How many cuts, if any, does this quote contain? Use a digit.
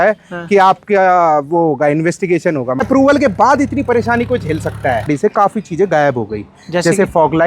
2